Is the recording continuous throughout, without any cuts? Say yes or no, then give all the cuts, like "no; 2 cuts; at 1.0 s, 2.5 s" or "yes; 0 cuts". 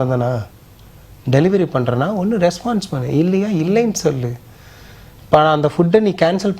yes; 0 cuts